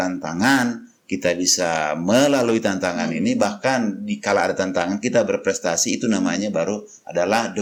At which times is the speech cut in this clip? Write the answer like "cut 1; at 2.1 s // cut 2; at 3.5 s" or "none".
none